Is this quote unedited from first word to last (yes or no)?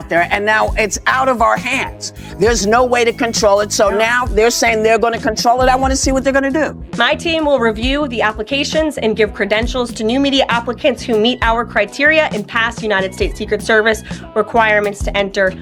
yes